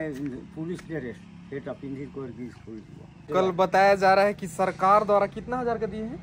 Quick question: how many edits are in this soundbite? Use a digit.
1